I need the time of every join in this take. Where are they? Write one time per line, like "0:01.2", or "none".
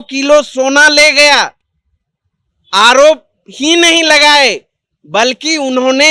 none

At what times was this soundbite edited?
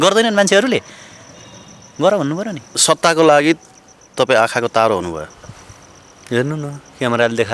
0:02.7

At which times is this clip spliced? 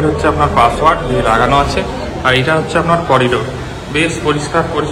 none

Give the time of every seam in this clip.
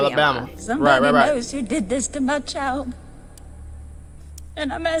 none

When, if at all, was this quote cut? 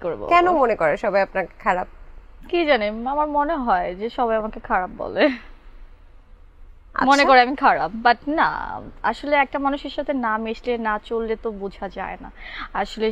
none

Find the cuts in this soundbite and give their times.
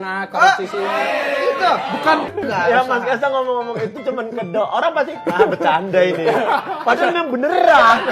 0:02.3

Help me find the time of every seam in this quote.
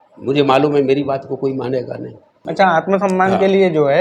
0:02.4

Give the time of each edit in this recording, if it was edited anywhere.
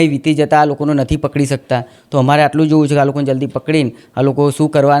none

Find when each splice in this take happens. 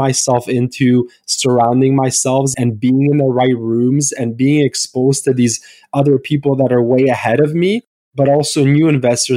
0:02.5

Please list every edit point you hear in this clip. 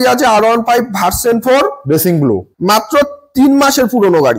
0:02.5

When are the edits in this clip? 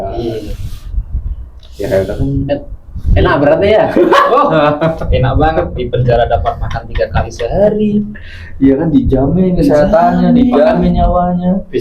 none

